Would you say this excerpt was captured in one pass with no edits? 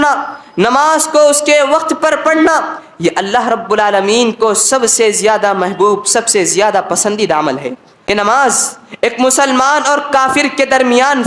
no; 1 cut; at 7.9 s

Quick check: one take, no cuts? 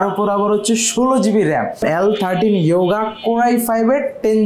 no; 1 cut; at 1.8 s

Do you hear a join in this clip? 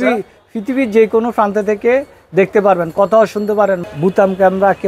yes; 1 cut; at 3.8 s

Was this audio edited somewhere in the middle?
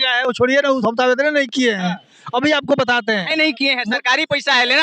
no; 0 cuts

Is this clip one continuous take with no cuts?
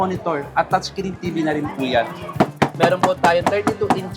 no; 1 cut; at 2.3 s

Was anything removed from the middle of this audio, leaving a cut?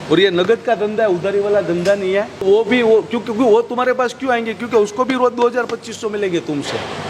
yes; 1 cut; at 2.4 s

